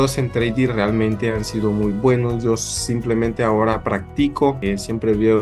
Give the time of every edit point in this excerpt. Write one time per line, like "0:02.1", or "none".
none